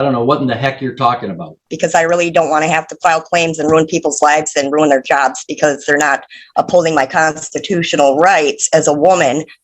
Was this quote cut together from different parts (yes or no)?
yes